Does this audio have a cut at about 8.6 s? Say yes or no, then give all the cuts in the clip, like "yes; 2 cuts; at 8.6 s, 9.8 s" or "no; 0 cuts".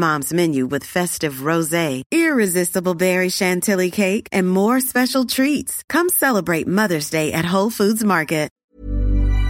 yes; 1 cut; at 8.6 s